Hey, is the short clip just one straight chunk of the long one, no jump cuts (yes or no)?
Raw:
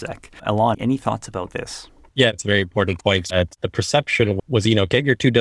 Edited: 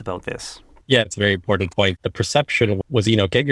no